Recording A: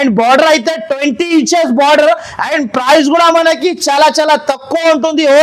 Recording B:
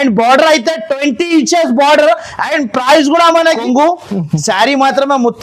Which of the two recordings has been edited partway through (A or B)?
B